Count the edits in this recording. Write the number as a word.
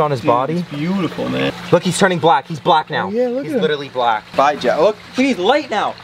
two